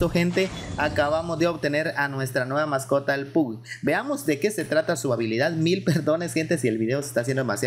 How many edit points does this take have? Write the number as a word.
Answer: zero